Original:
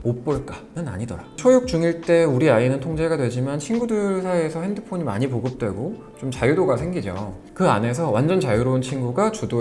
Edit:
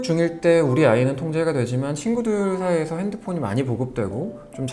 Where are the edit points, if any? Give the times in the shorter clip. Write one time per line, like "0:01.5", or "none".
none

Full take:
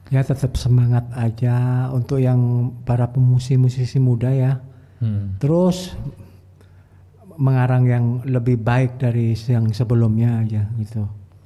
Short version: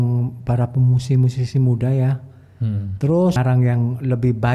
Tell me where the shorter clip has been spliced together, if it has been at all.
0:03.4

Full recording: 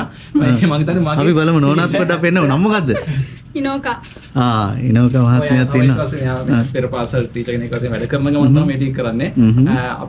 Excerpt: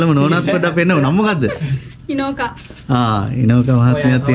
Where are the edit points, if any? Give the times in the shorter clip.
none

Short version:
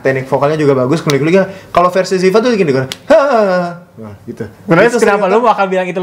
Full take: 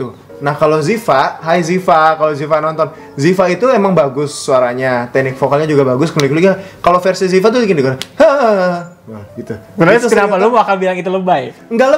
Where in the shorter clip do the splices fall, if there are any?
none

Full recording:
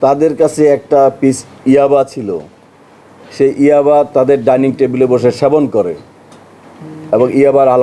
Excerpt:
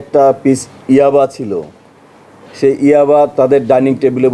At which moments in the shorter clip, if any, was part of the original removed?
none

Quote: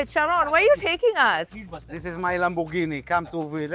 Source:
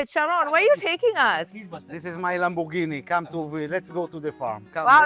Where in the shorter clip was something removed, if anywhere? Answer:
none

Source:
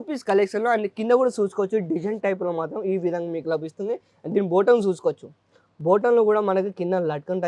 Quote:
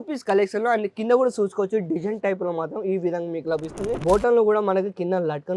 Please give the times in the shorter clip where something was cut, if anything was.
0:03.9

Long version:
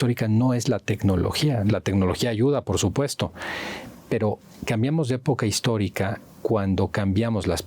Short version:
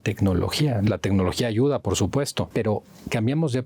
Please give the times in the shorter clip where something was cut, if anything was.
0:02.5

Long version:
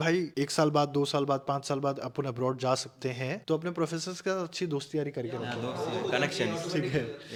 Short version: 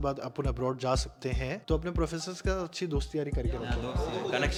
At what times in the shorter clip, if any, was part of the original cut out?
none

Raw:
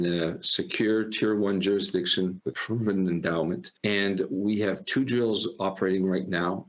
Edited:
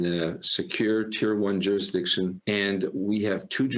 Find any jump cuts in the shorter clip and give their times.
0:02.4

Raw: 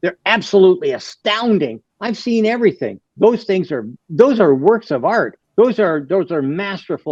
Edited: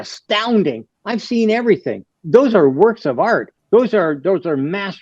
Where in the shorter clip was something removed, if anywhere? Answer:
0:02.1

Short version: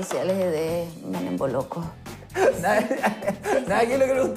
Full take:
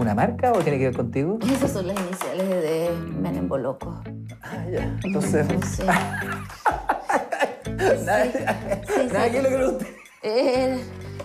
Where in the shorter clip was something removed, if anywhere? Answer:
0:02.2

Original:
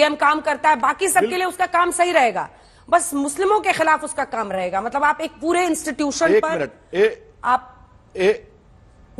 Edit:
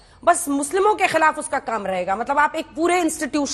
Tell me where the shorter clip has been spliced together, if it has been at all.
none

